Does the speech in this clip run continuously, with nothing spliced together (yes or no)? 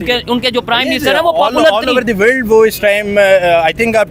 yes